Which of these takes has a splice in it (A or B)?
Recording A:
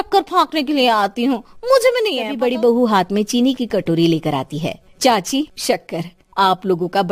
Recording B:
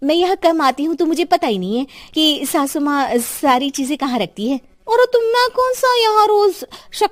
A